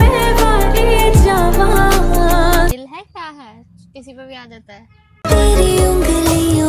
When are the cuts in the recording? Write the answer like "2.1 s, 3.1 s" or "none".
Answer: 2.7 s